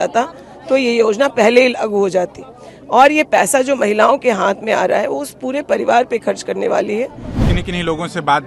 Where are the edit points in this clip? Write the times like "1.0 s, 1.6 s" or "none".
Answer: 7.4 s